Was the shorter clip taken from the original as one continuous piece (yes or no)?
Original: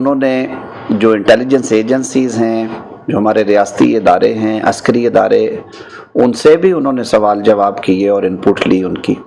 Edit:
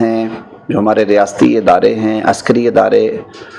yes